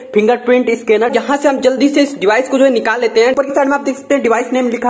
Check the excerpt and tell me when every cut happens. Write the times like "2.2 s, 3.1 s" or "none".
1.1 s, 3.3 s